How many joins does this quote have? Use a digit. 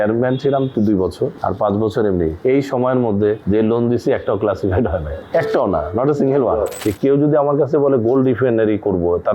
5